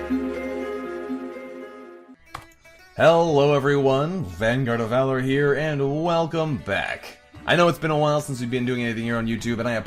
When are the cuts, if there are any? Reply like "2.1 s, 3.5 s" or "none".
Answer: none